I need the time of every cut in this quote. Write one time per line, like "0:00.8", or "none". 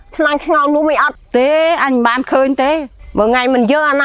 0:01.2
0:03.0